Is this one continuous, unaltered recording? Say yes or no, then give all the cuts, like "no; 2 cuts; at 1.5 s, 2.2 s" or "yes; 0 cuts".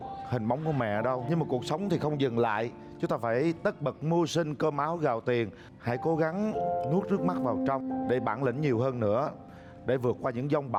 yes; 0 cuts